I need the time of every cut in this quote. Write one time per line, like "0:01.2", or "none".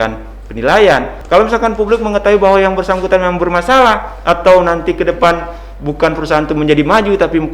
0:01.1